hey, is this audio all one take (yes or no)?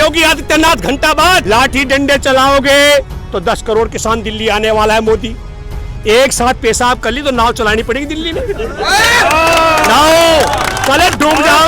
no